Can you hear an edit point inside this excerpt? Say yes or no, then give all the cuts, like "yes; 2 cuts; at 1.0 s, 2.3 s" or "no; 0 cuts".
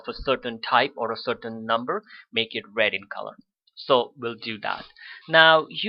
no; 0 cuts